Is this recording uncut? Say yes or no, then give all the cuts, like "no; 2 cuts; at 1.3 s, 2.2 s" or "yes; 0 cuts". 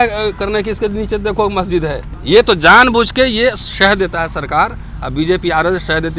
no; 1 cut; at 2.1 s